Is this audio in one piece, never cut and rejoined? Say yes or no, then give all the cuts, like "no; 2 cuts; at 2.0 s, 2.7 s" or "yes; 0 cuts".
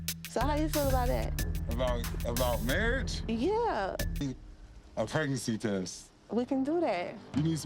no; 1 cut; at 4.2 s